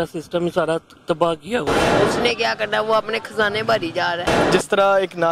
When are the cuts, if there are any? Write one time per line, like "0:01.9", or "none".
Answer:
0:01.8
0:04.3